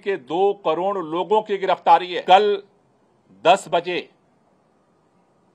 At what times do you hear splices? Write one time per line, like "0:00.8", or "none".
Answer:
0:02.1

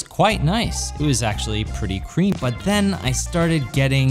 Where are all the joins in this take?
0:02.3

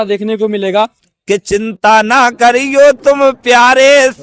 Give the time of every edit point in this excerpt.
0:01.1

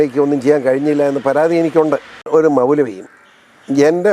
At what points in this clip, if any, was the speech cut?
0:02.3

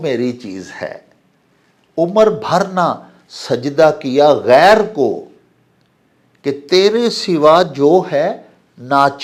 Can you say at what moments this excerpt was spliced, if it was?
none

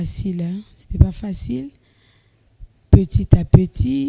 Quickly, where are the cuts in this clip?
none

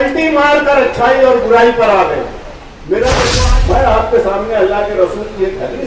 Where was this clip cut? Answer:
0:03.4

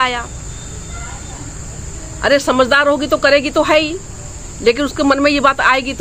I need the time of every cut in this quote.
none

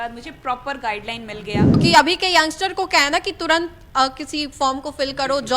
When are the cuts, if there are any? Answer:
0:01.7

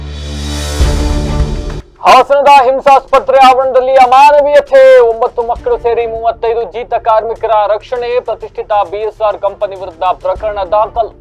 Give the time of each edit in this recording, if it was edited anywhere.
0:01.2

